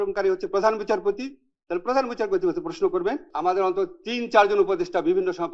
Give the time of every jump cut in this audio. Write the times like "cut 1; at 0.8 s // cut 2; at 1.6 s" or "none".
cut 1; at 3.3 s